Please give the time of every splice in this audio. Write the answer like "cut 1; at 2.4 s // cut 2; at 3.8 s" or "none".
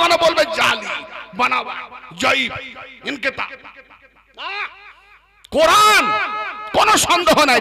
none